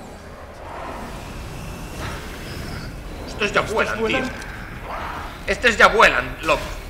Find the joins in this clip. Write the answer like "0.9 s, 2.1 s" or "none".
none

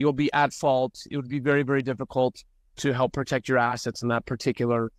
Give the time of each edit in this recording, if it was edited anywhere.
none

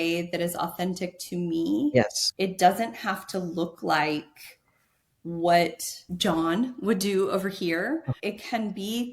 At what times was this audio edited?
2.2 s, 6.1 s, 8.1 s

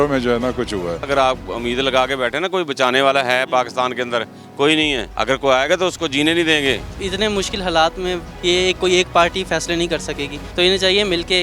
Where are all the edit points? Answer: 1.1 s, 5.1 s, 6.9 s, 10.4 s

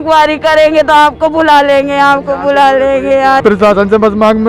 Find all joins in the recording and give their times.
3.4 s

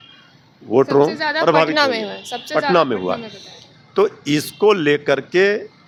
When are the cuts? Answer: none

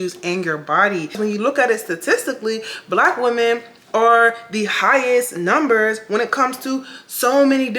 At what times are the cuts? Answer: 1.2 s

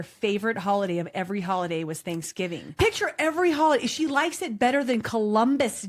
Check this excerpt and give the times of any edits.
2.8 s

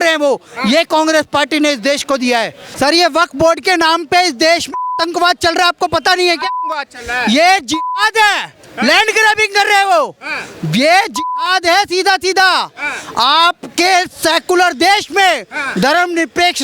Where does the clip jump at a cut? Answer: 2.6 s

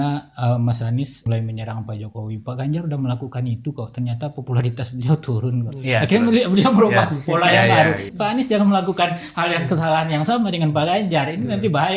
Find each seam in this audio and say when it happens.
1.3 s, 8.1 s

